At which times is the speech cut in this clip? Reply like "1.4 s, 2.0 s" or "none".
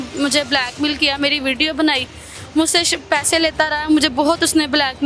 none